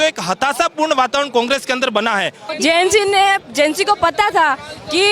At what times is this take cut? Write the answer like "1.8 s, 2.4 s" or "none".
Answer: 2.4 s